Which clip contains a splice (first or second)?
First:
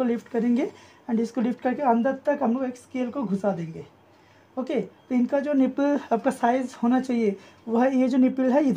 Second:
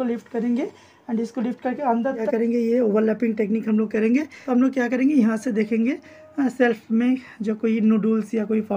second